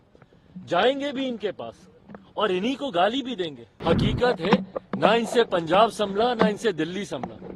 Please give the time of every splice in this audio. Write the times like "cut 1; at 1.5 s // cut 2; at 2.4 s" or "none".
cut 1; at 3.6 s